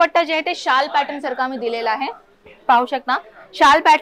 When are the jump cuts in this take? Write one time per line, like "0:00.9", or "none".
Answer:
none